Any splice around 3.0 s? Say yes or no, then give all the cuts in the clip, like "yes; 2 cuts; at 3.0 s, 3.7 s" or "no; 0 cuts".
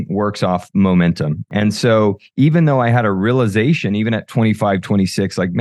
no; 1 cut; at 1.4 s